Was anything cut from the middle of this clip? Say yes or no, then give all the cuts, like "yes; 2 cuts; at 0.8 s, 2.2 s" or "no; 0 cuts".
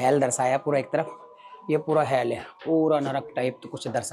no; 0 cuts